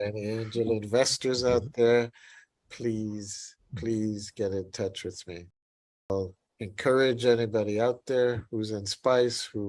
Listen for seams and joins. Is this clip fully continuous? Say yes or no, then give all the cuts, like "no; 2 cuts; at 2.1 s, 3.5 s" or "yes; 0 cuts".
no; 1 cut; at 6.1 s